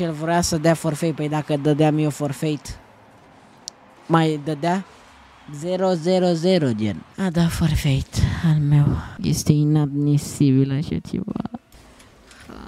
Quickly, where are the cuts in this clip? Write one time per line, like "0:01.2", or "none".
0:07.1
0:09.1
0:11.7